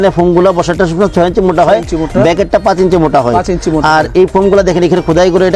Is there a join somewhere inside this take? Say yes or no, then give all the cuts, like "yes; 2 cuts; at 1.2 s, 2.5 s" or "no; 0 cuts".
no; 0 cuts